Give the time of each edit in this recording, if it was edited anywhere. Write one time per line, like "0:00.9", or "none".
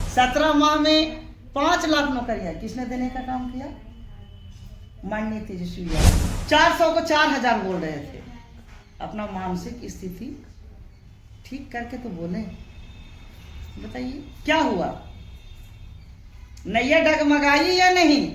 0:06.2